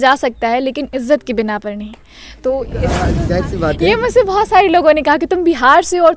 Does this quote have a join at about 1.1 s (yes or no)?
no